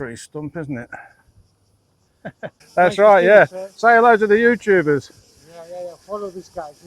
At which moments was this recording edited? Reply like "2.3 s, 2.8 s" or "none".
2.6 s

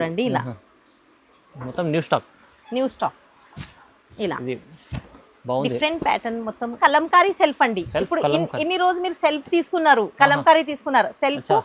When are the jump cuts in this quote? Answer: 6.8 s

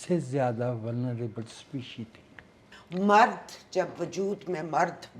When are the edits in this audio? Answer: 2.7 s

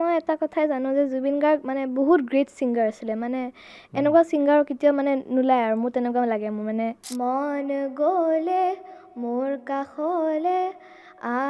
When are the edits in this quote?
7.0 s

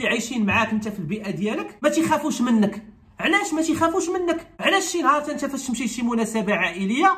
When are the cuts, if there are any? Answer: 4.5 s

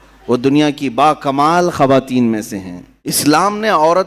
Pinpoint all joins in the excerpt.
3.2 s

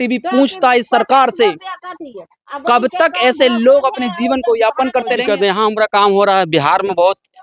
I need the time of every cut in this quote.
5.2 s

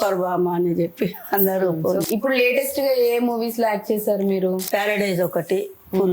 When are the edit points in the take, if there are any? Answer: 2.1 s, 4.7 s

